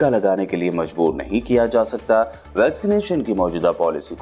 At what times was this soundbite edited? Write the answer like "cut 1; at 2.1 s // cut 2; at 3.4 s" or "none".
none